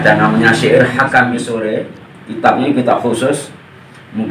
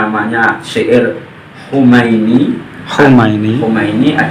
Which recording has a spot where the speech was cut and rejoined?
first; 1 cut; at 1.4 s

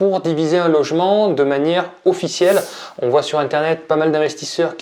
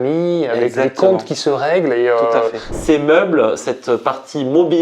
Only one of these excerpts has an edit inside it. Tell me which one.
second; 2 cuts; at 2.7 s, 3.6 s

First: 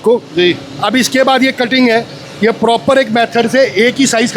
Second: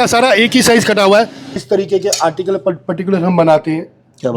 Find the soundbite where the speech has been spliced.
second; 1 cut; at 1.6 s

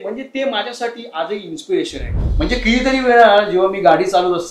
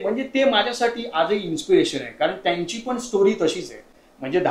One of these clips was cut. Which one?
first; 1 cut; at 2.1 s

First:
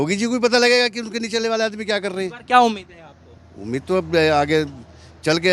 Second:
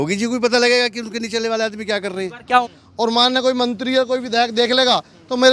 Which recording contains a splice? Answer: second; 1 cut; at 2.6 s

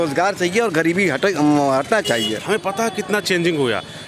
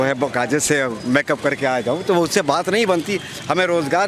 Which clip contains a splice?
first; 1 cut; at 2.4 s

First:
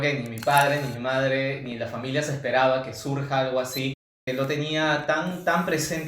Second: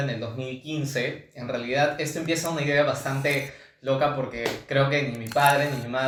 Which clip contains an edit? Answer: first; 1 cut; at 4.3 s

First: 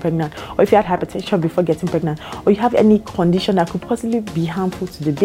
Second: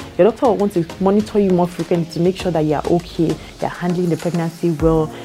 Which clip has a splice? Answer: second; 1 cut; at 0.9 s

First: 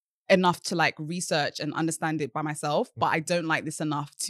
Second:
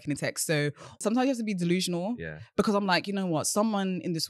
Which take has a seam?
second; 1 cut; at 1.0 s

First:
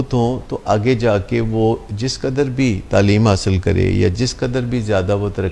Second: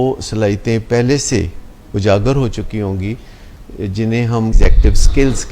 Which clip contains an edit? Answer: second; 1 cut; at 4.6 s

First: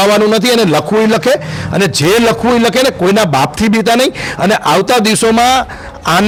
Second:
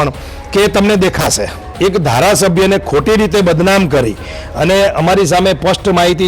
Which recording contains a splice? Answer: second; 1 cut; at 1.6 s

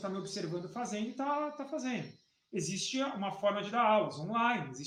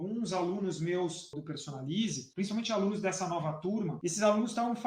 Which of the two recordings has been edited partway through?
second; 3 cuts; at 1.3 s, 2.2 s, 3.9 s

